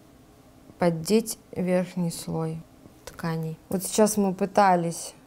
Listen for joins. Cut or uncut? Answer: cut